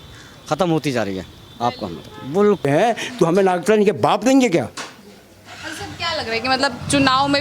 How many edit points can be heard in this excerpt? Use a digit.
1